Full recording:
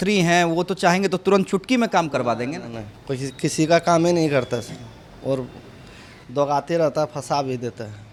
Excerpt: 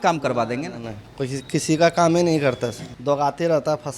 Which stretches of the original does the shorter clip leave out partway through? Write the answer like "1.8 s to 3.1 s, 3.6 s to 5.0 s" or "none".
4.8 s to 6.2 s